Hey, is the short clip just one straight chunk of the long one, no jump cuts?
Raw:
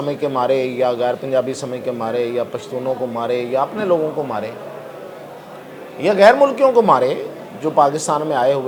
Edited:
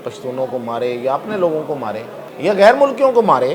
no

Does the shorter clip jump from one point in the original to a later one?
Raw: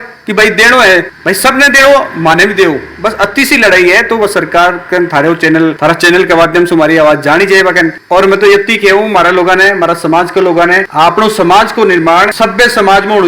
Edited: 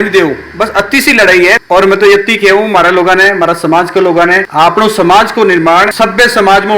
yes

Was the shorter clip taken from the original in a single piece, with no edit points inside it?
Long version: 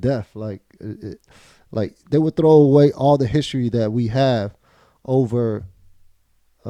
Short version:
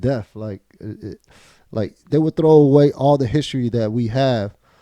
yes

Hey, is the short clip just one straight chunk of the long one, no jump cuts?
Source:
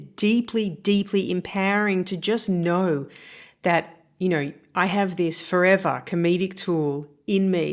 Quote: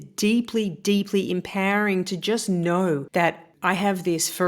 no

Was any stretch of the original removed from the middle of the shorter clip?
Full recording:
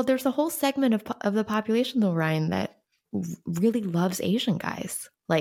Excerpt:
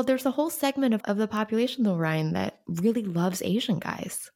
yes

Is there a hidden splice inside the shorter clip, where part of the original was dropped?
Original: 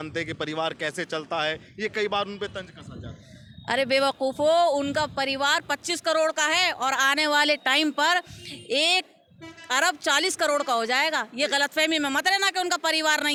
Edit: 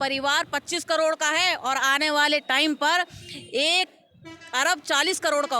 no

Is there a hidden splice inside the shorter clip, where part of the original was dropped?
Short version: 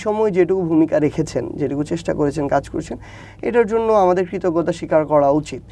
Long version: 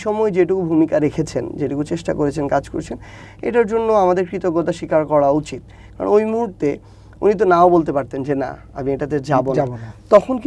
no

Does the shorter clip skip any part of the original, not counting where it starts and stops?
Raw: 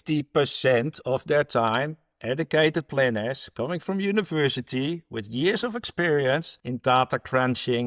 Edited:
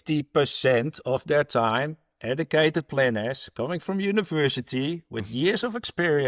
no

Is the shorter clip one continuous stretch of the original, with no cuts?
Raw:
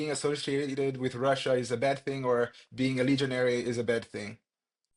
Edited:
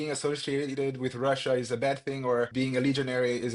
no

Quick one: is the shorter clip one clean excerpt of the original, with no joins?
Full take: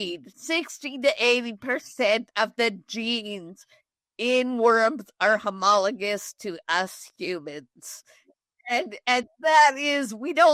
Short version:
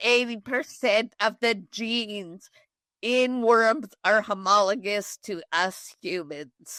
yes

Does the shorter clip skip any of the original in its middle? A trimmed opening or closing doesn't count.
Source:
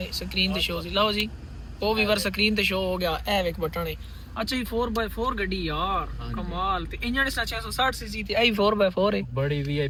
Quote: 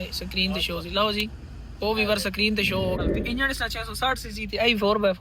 yes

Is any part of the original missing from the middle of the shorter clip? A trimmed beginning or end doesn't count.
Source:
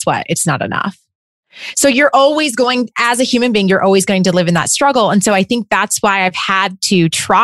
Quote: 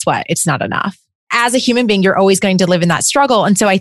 yes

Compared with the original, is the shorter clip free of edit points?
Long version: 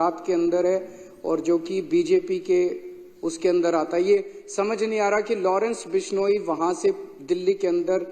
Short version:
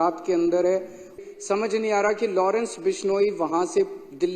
no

